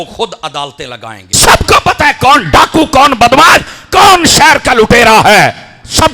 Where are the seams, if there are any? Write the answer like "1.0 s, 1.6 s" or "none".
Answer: 1.3 s